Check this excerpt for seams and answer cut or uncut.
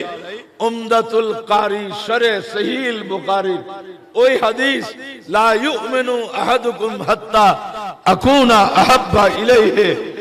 uncut